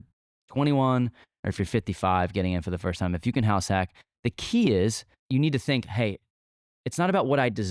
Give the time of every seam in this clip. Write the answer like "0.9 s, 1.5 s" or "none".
5.2 s